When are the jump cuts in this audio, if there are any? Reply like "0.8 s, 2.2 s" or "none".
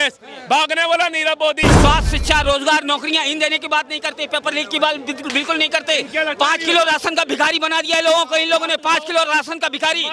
1.7 s